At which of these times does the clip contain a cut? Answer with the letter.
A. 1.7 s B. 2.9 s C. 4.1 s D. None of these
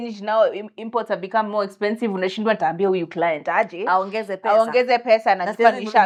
D